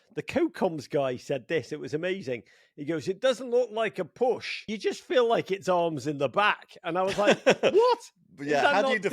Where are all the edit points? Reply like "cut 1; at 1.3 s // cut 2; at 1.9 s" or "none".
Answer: cut 1; at 4.7 s

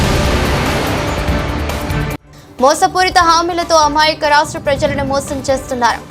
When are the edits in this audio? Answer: none

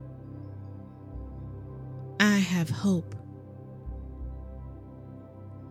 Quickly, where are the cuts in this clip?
cut 1; at 3.2 s

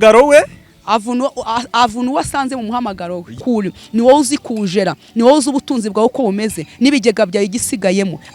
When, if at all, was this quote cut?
cut 1; at 3.4 s

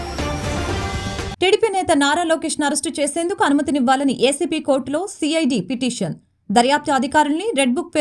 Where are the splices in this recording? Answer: cut 1; at 1.3 s

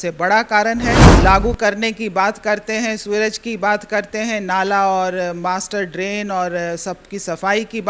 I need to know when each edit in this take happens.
cut 1; at 1.1 s

